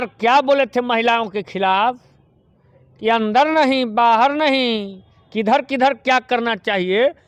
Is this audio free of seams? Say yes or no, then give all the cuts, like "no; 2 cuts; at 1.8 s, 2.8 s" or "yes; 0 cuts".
yes; 0 cuts